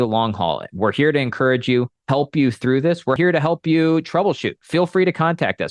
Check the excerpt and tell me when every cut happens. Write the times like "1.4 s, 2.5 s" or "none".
2.0 s, 3.2 s